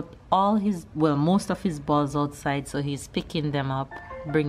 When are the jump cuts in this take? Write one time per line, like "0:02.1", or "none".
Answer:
none